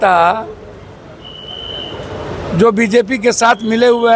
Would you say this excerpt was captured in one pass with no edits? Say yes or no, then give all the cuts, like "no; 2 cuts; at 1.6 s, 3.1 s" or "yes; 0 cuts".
yes; 0 cuts